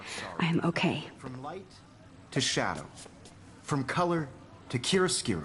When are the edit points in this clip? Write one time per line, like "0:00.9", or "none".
0:01.2